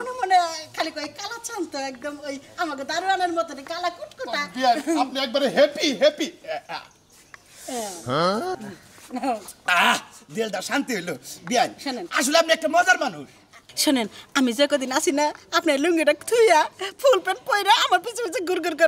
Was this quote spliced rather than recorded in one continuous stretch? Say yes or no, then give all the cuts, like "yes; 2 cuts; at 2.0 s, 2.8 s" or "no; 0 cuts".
no; 0 cuts